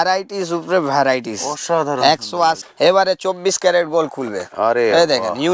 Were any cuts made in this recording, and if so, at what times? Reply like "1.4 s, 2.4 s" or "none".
2.7 s